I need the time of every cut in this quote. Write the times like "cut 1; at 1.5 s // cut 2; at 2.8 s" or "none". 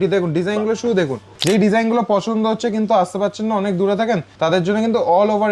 cut 1; at 1.3 s // cut 2; at 4.3 s